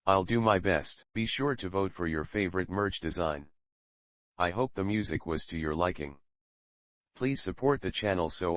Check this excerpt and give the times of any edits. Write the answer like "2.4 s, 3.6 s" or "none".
0.9 s